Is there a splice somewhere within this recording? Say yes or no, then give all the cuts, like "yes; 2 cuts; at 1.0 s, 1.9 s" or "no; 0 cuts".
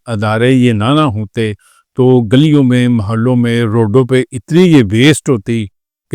no; 0 cuts